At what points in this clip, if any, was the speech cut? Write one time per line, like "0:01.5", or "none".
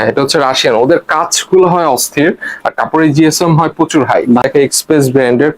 0:04.5